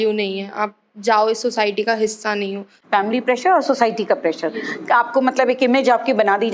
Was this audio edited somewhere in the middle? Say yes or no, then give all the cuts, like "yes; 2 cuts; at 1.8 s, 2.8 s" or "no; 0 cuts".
yes; 1 cut; at 2.7 s